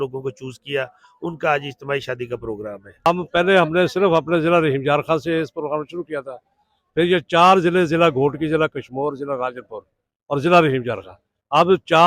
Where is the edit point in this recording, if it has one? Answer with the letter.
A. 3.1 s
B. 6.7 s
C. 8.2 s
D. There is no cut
A